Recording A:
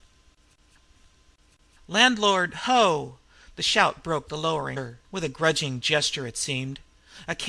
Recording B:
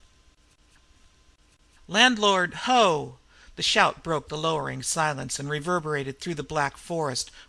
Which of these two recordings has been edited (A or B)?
B